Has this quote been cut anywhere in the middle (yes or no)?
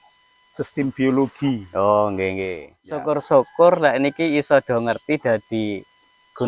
yes